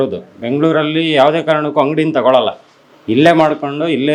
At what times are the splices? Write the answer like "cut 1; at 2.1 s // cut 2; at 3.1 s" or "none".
none